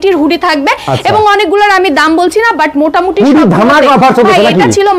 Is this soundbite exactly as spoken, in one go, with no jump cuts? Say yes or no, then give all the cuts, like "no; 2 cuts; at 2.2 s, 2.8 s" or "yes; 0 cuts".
yes; 0 cuts